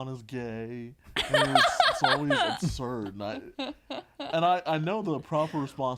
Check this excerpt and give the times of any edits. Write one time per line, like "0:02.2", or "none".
none